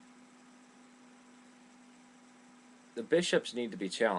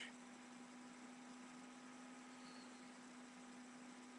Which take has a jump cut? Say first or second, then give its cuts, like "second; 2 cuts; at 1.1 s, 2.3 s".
second; 1 cut; at 1.6 s